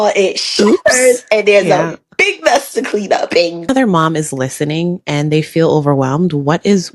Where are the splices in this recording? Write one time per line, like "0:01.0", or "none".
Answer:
0:03.7